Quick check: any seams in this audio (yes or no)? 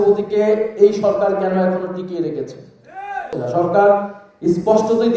yes